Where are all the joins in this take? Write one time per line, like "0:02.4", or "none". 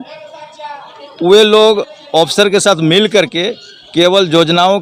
none